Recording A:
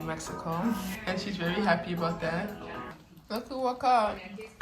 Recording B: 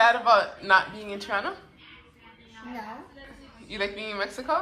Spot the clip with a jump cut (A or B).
A